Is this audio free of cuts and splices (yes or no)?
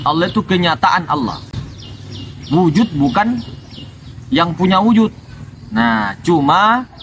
yes